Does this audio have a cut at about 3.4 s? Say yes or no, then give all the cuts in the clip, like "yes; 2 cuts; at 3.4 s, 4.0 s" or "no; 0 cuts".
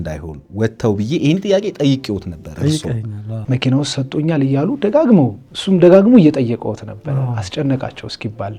yes; 1 cut; at 3.4 s